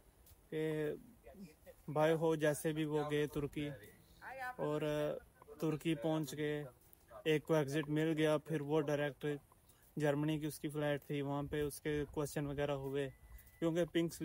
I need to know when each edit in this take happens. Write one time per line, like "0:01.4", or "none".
none